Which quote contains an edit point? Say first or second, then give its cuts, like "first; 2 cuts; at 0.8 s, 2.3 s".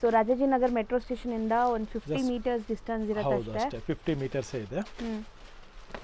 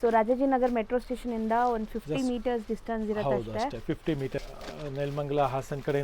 second; 1 cut; at 4.4 s